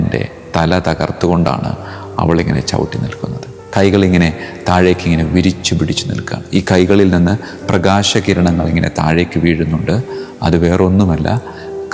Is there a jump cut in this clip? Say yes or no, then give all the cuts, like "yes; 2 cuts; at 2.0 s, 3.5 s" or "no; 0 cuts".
no; 0 cuts